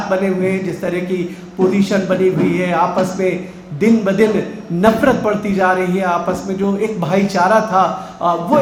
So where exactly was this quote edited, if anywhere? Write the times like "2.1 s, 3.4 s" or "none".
none